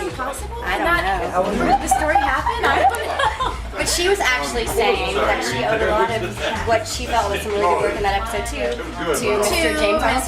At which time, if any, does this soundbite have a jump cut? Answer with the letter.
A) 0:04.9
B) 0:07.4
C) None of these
A